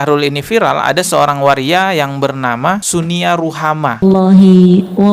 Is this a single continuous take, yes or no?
no